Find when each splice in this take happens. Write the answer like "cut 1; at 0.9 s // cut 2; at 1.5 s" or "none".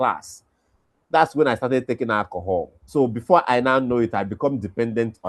cut 1; at 2.8 s